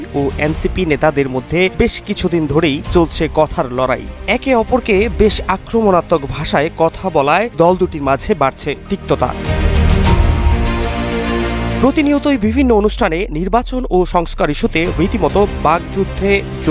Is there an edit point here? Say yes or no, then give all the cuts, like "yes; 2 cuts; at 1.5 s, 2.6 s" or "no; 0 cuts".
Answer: no; 0 cuts